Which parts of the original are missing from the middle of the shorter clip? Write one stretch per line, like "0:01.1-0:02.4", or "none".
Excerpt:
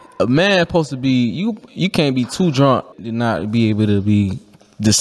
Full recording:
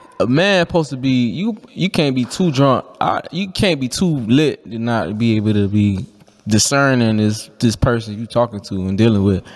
0:02.9-0:04.6